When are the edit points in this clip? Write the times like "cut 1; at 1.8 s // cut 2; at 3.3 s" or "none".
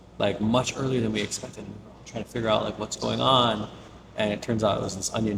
none